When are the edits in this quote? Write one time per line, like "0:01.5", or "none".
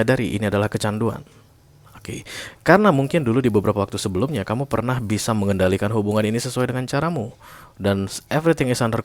none